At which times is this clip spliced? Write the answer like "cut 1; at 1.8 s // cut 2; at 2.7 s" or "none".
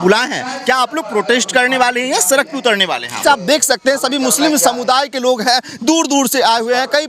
cut 1; at 3.2 s